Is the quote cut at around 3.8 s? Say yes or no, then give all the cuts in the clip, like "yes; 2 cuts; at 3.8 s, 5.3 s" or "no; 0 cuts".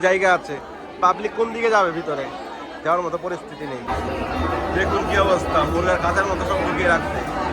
yes; 1 cut; at 3.8 s